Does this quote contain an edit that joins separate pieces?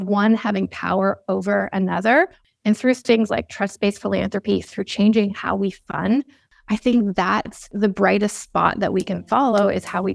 yes; 3 cuts; at 2.4 s, 6.5 s, 7.7 s

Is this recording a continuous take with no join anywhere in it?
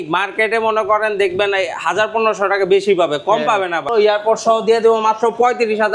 no; 1 cut; at 3.9 s

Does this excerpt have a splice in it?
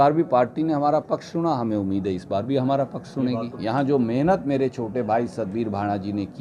yes; 1 cut; at 3.5 s

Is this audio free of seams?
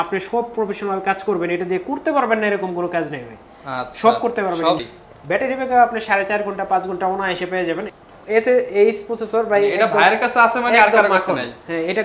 no; 2 cuts; at 4.8 s, 7.9 s

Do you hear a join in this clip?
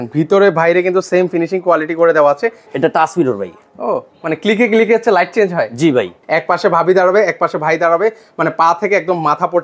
yes; 2 cuts; at 2.6 s, 6.2 s

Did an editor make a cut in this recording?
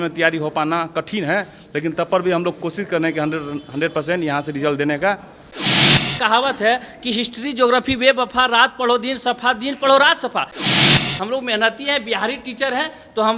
yes; 2 cuts; at 5.8 s, 10.9 s

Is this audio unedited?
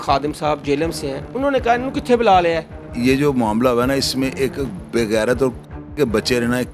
no; 1 cut; at 2.9 s

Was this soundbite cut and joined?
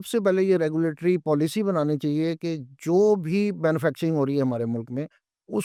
no; 0 cuts

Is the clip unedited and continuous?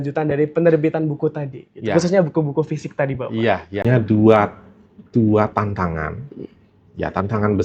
no; 1 cut; at 3.8 s

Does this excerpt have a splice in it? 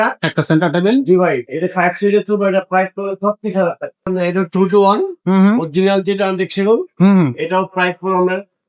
yes; 1 cut; at 4.1 s

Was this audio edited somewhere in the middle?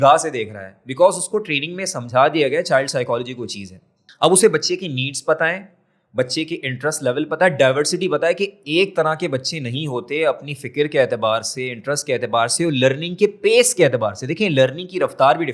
no; 0 cuts

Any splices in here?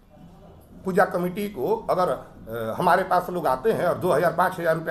no; 0 cuts

